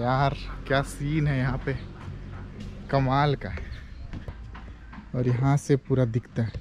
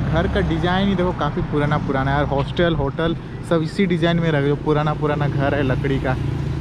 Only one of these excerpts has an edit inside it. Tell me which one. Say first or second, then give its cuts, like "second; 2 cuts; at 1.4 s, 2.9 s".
first; 1 cut; at 4.3 s